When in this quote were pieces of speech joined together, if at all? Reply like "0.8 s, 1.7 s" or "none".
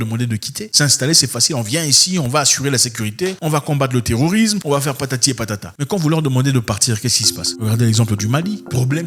none